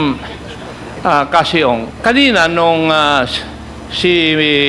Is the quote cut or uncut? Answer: cut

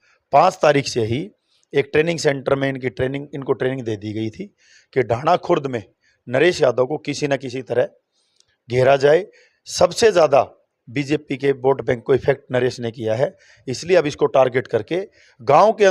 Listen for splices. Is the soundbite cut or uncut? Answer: uncut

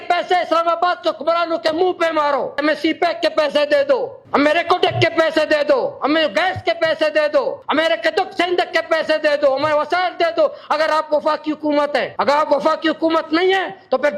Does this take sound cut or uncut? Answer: cut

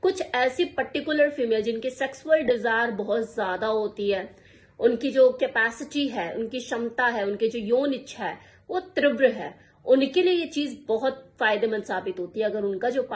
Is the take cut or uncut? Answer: uncut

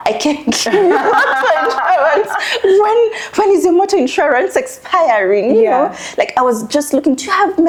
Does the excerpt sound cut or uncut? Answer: uncut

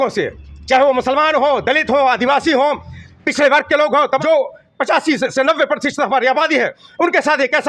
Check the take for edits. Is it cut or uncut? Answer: cut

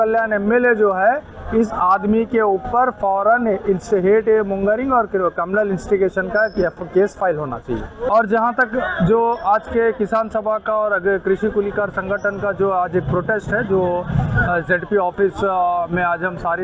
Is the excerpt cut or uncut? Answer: cut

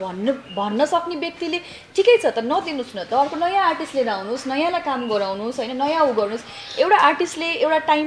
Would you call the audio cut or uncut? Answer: uncut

